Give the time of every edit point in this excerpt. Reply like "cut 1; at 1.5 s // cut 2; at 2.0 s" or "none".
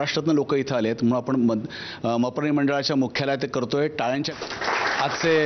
cut 1; at 4.3 s